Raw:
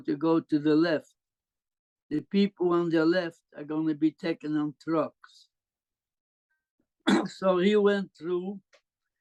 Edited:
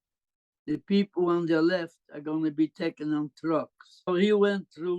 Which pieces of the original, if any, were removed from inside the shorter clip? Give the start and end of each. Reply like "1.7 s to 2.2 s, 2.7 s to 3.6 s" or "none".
5.5 s to 7.5 s